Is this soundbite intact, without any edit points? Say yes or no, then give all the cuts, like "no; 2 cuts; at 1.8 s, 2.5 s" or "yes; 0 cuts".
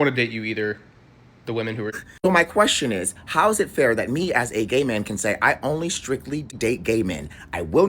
no; 2 cuts; at 1.9 s, 6.5 s